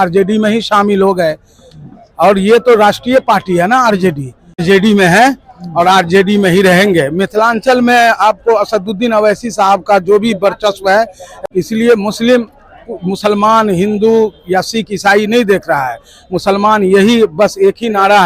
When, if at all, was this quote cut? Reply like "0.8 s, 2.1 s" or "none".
4.6 s, 11.2 s